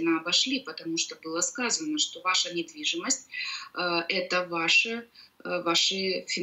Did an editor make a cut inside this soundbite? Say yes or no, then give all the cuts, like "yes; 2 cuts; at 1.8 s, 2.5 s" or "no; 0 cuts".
no; 0 cuts